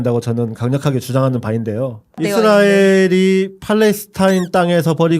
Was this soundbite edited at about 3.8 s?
no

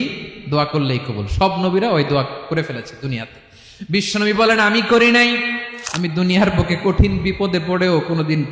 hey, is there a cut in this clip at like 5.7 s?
yes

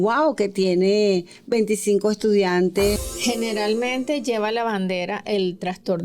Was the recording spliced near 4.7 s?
no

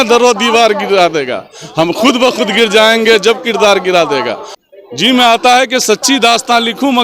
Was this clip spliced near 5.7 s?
no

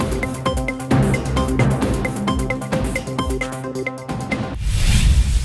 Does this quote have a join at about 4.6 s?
yes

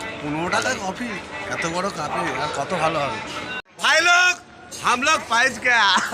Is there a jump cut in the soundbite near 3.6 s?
yes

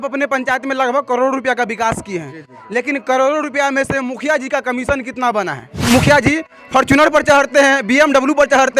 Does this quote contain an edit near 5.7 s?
yes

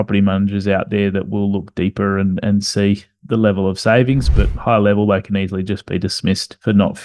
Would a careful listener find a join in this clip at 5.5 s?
no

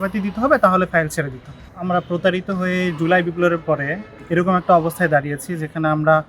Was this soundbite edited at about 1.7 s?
yes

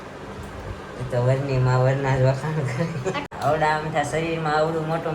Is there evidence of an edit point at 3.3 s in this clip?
yes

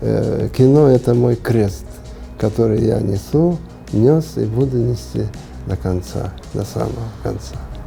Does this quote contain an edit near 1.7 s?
no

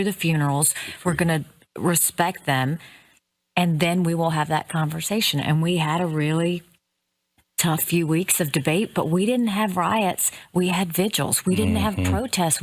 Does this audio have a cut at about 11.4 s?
no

